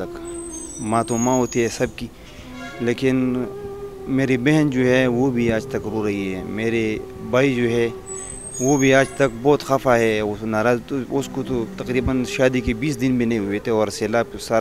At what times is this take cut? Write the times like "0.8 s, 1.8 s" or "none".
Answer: none